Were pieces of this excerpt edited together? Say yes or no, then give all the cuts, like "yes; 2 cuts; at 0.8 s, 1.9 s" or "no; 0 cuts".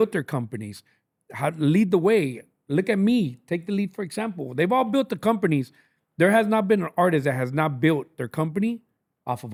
no; 0 cuts